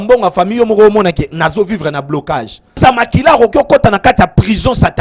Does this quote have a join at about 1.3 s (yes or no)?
no